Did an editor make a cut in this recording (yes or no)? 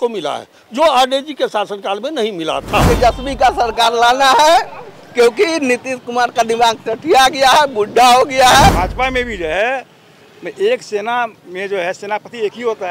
yes